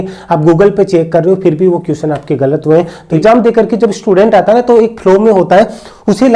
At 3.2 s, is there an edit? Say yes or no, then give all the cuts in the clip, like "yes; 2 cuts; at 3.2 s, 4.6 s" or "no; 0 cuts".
yes; 1 cut; at 3.2 s